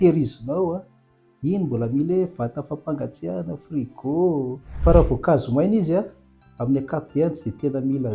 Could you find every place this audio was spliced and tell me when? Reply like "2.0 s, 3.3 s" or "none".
4.6 s